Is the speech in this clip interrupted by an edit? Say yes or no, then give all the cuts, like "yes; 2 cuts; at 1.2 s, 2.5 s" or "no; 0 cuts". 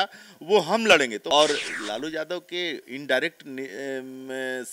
yes; 1 cut; at 1.2 s